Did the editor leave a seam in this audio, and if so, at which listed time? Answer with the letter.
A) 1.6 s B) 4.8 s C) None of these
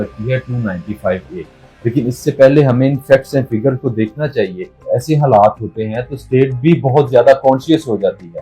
B